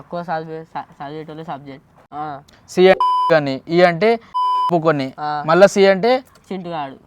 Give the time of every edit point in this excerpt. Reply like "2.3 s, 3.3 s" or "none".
2.1 s, 4.7 s